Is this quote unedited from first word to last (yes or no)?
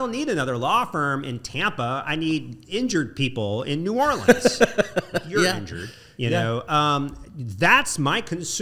yes